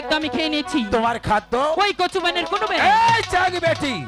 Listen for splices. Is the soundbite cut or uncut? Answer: uncut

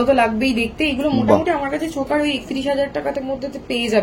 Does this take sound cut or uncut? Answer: uncut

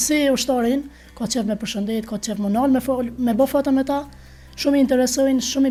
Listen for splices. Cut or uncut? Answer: uncut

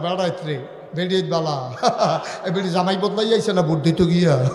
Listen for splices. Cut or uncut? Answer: uncut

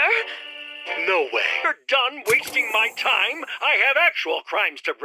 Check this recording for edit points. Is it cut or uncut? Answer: cut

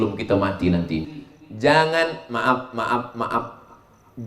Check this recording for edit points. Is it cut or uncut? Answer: cut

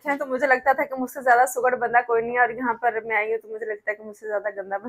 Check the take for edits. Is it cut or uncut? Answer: uncut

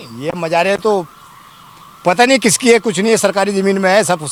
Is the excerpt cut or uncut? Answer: uncut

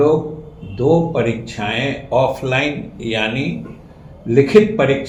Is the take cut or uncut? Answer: uncut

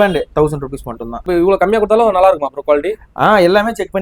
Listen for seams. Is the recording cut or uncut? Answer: cut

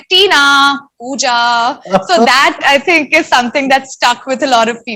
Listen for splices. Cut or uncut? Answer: uncut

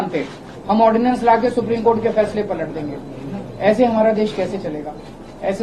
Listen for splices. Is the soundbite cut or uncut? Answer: uncut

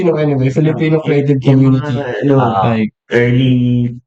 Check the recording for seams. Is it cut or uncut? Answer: uncut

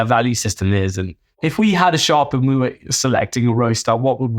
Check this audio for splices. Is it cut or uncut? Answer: cut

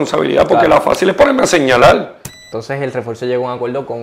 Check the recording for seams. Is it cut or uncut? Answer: cut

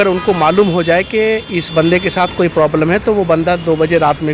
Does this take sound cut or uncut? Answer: uncut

